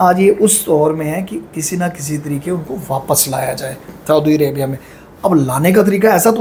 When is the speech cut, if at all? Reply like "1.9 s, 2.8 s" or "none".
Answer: none